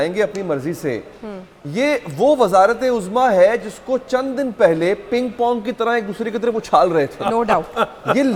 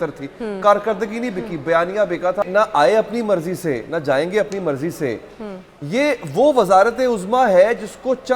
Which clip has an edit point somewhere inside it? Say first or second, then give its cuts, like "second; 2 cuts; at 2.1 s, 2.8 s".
second; 1 cut; at 2.4 s